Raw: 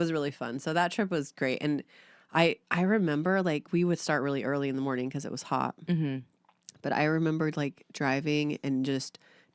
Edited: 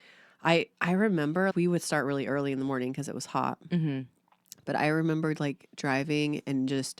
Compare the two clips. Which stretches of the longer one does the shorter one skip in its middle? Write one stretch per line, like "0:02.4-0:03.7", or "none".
0:03.4-0:03.7